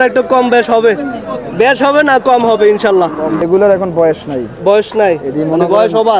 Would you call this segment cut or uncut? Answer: cut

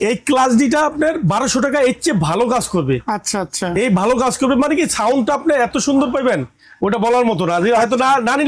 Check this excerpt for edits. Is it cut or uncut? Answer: uncut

